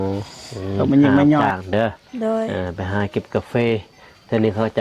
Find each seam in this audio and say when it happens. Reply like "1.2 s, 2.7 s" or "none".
1.4 s